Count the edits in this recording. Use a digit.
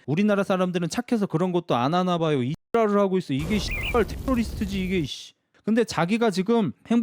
1